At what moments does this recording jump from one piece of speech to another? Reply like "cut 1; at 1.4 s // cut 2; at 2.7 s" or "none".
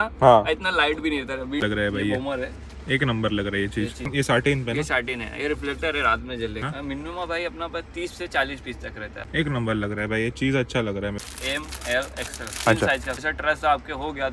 cut 1; at 1.6 s // cut 2; at 4.1 s // cut 3; at 6.6 s // cut 4; at 9.1 s // cut 5; at 11.2 s // cut 6; at 13.2 s